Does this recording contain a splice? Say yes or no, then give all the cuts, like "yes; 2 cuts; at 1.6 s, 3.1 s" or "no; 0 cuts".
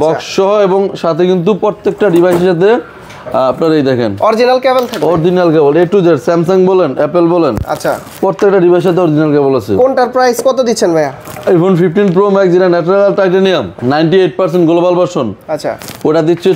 no; 0 cuts